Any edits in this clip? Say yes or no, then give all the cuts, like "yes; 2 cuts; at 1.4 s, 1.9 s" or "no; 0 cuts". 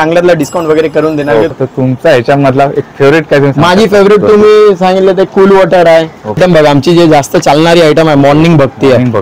yes; 2 cuts; at 1.5 s, 6.4 s